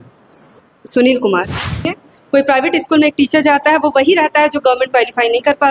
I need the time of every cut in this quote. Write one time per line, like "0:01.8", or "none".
0:01.9